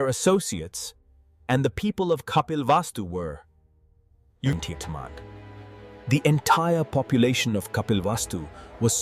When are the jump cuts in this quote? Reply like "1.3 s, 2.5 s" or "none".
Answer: 4.5 s